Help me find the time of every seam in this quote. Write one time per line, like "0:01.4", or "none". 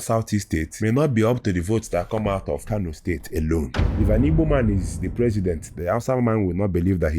0:02.6
0:03.9